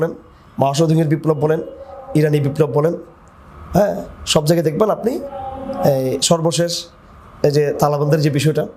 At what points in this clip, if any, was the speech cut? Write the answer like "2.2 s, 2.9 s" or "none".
none